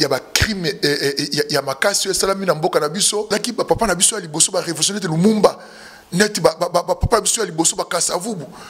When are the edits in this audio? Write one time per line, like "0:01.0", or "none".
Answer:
0:03.3